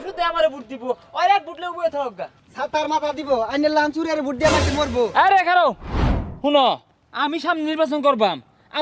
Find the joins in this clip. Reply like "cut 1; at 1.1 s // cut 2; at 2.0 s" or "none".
none